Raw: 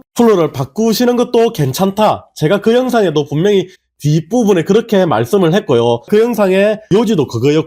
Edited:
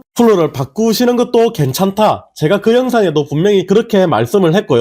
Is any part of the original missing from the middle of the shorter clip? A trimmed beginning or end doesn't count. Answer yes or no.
yes